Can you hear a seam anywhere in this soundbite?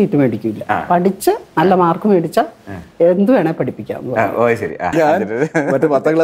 yes; 1 cut; at 4.9 s

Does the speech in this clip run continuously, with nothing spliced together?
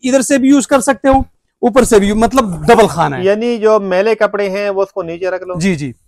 yes; 0 cuts

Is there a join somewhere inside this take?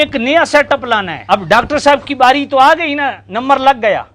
yes; 1 cut; at 1.1 s

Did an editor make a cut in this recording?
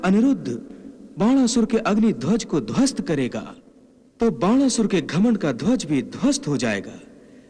no; 0 cuts

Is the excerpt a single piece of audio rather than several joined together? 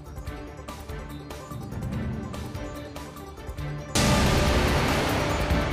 no; 1 cut; at 1.3 s

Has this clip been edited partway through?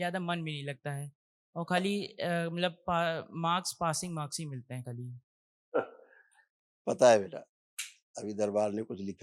no; 0 cuts

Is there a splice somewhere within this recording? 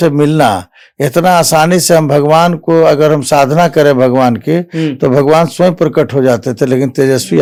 no; 0 cuts

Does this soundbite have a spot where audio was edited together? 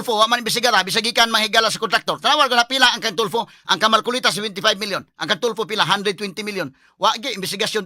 no; 0 cuts

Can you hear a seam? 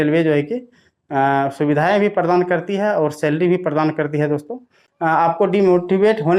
yes; 1 cut; at 5.0 s

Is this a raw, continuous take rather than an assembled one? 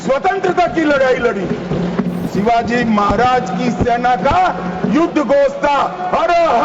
no; 1 cut; at 2.3 s

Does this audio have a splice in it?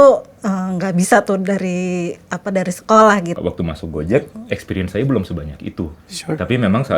yes; 1 cut; at 3.3 s

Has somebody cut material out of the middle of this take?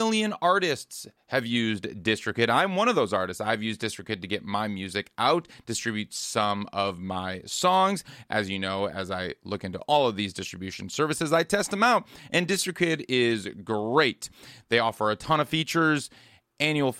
no; 0 cuts

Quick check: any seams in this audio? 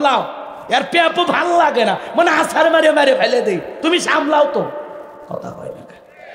no; 0 cuts

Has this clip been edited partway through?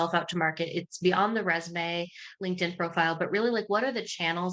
no; 0 cuts

